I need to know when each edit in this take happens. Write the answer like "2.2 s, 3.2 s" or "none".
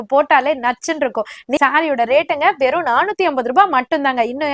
1.6 s